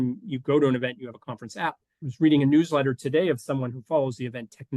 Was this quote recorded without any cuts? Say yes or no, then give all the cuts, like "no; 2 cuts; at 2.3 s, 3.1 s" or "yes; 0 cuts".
no; 1 cut; at 2.1 s